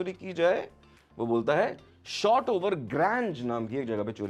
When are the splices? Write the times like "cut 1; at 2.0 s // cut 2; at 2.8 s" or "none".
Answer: none

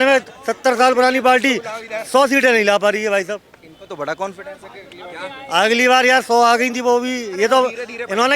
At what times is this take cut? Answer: none

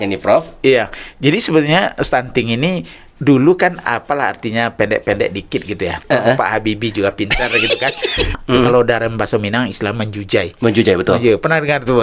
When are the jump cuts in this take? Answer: cut 1; at 8.3 s

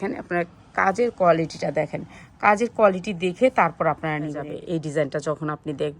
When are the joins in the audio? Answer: cut 1; at 4.5 s

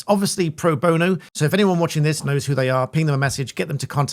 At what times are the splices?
cut 1; at 1.3 s

